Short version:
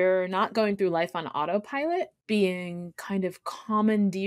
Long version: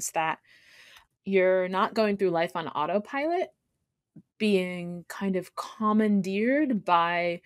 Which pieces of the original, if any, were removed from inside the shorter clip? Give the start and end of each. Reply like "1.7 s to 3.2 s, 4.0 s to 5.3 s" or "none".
3.6 s to 4.3 s